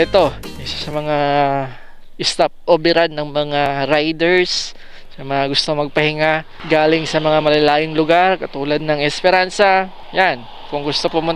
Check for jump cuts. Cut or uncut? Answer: cut